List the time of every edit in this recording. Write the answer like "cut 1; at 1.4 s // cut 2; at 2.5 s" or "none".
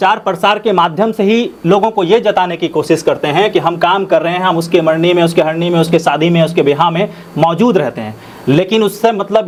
none